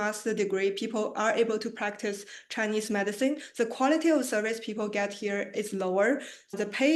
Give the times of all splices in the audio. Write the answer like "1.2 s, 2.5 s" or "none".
none